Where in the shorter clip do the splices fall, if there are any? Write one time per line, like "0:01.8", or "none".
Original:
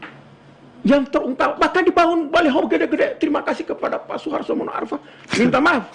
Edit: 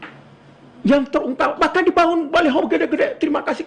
none